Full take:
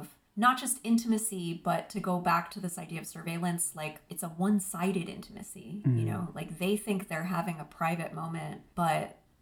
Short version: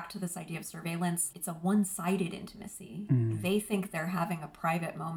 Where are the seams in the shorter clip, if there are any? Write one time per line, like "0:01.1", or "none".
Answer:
0:01.3
0:03.3